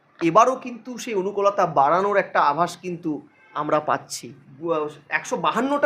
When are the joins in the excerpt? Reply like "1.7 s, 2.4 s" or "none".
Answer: 4.4 s